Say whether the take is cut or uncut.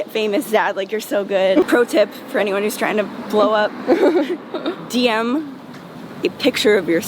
cut